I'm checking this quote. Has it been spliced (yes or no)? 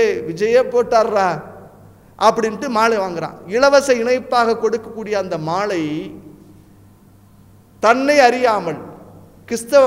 no